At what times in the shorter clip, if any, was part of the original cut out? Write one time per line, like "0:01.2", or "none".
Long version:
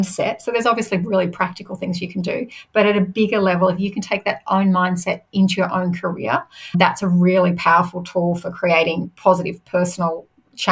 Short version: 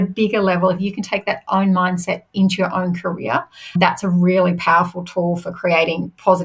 none